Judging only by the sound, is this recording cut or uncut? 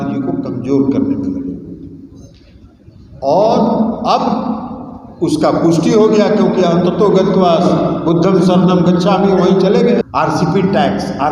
cut